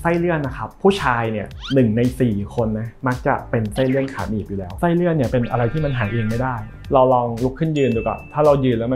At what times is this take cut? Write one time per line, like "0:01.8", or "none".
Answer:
0:04.6
0:06.7